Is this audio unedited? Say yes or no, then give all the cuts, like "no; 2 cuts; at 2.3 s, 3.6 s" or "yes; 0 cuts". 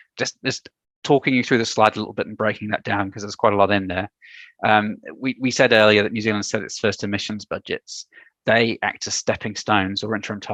yes; 0 cuts